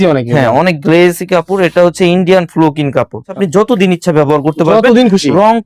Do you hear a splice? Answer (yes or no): yes